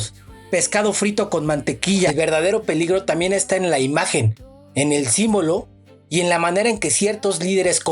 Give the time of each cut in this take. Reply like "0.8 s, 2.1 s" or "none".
2.1 s